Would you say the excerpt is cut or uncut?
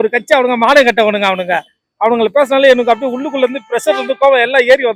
uncut